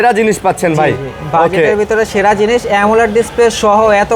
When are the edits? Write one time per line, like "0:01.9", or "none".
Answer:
none